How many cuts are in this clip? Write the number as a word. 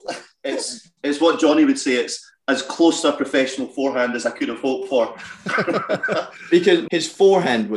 one